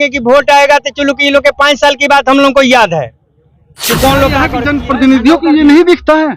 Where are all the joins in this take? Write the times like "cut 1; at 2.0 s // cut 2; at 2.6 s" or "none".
cut 1; at 4.5 s

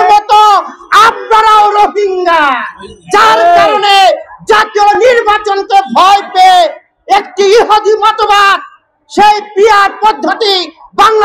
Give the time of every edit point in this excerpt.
none

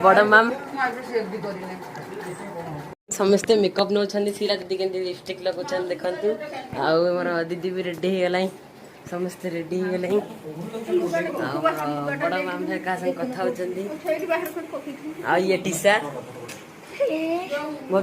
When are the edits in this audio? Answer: cut 1; at 2.9 s

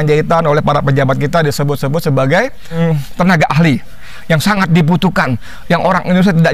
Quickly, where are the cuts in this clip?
cut 1; at 2.7 s

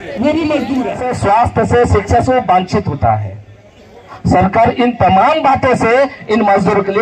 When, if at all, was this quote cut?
cut 1; at 1.1 s

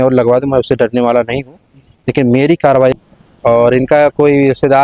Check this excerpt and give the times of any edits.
cut 1; at 2.9 s

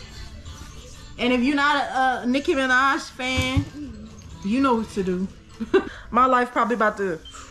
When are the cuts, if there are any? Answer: cut 1; at 5.8 s

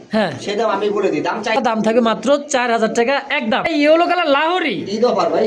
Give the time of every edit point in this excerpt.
cut 1; at 1.6 s // cut 2; at 3.8 s

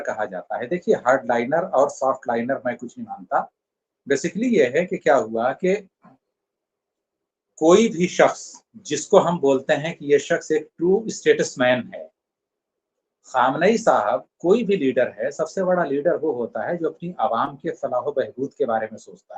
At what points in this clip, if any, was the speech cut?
none

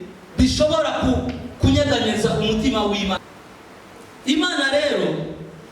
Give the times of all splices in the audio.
cut 1; at 3.2 s

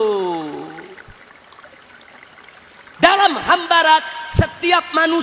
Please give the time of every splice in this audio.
none

